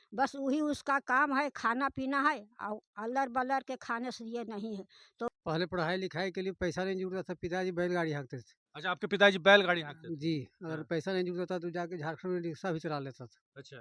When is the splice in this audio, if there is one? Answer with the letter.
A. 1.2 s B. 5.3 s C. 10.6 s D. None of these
B